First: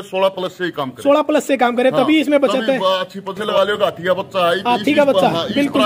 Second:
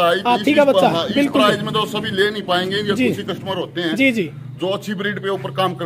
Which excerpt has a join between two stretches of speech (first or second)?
first